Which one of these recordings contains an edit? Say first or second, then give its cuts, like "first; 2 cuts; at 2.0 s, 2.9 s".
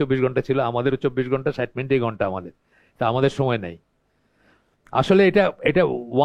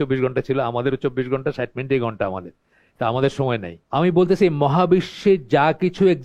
second; 1 cut; at 3.7 s